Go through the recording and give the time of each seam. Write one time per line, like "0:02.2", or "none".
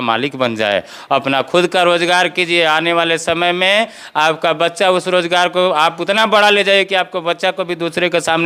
none